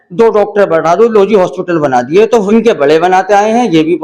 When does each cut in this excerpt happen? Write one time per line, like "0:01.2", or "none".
0:02.4